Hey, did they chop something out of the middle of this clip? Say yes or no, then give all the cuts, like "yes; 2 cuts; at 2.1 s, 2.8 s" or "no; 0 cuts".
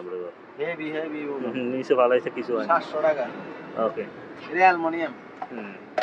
no; 0 cuts